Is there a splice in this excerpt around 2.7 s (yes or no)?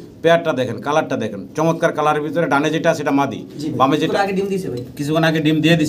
no